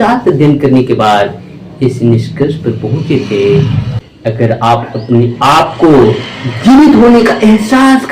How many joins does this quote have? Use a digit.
1